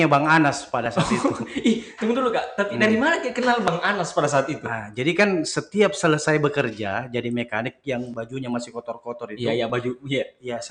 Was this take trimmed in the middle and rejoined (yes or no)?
no